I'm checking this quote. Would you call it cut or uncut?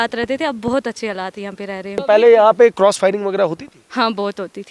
cut